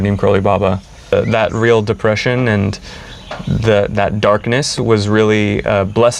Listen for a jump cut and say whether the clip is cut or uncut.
cut